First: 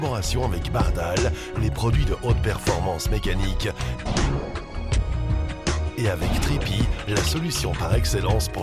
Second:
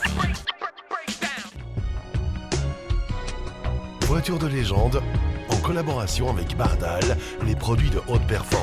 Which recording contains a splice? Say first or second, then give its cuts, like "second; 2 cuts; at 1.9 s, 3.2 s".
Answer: second; 1 cut; at 1.6 s